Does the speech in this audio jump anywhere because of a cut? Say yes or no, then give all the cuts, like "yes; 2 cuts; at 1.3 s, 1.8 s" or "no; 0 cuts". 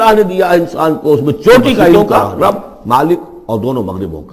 yes; 1 cut; at 1.9 s